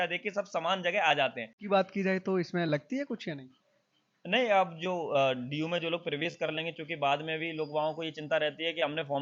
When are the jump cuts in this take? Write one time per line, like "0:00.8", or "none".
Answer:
0:01.5